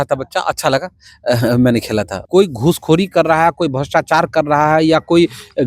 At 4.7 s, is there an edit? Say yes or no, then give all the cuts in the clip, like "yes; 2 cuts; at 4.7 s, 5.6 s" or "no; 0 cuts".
no; 1 cut; at 2.2 s